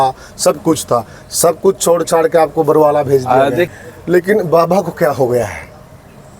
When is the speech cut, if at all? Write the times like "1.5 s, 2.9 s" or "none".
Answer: 3.7 s